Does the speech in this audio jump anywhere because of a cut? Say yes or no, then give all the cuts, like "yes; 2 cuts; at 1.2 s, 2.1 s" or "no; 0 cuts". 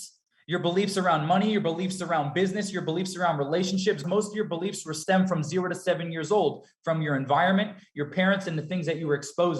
yes; 1 cut; at 4.0 s